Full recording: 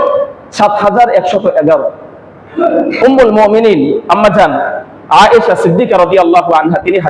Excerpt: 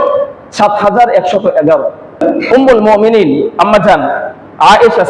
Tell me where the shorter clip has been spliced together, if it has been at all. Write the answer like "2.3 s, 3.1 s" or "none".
2.2 s